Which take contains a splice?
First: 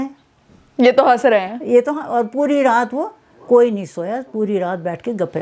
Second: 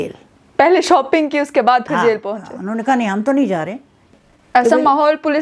second; 1 cut; at 4.1 s

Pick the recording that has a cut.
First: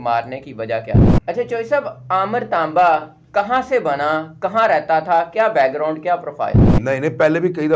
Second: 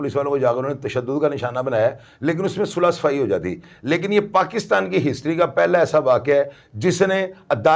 first; 2 cuts; at 1.1 s, 6.7 s

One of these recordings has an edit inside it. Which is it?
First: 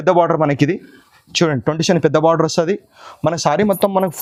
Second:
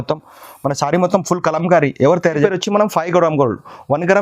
second; 1 cut; at 2.4 s

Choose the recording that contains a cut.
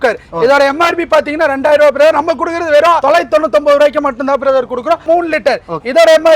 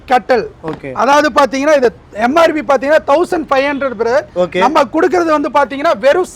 first; 2 cuts; at 3.0 s, 5.0 s

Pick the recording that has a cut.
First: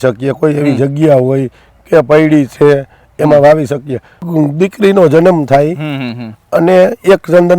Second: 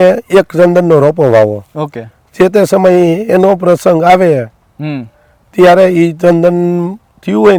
first; 1 cut; at 4.2 s

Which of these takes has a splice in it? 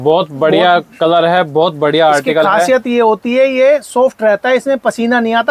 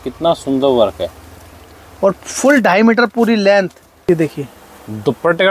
second; 1 cut; at 3.9 s

